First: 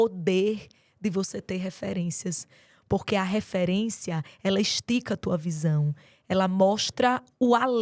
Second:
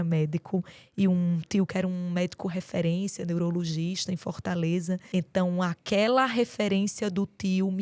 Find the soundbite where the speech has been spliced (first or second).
second